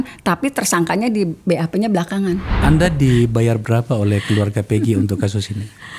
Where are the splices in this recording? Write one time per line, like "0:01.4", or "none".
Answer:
0:02.6